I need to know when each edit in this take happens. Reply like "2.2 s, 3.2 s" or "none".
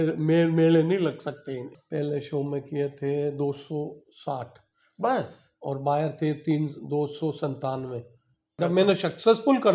1.8 s, 8.6 s